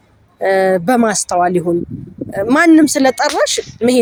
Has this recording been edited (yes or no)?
no